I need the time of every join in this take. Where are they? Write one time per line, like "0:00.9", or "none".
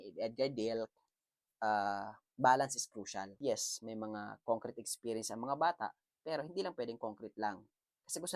none